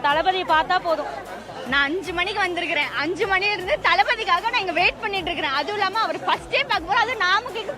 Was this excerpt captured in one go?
no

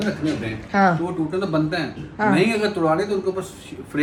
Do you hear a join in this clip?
no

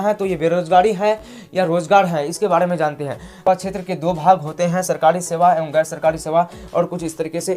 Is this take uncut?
no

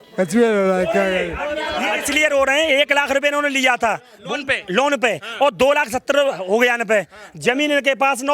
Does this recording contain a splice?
yes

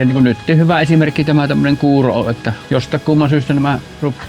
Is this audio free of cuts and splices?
no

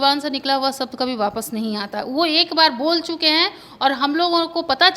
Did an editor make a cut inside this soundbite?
no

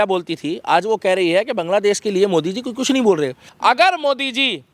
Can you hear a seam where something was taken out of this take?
yes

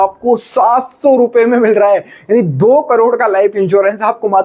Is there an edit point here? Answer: no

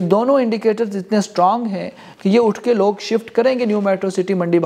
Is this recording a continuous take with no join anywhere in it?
yes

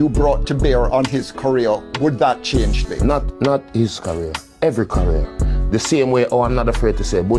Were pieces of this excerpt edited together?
no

